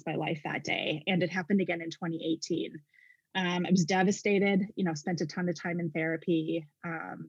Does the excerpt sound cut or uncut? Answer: uncut